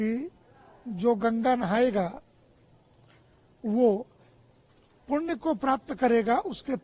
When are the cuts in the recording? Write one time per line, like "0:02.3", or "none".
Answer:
none